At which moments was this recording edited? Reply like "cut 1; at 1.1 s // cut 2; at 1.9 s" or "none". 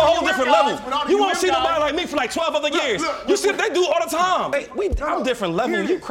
cut 1; at 4.5 s